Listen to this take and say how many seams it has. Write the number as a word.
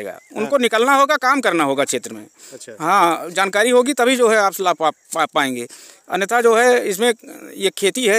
zero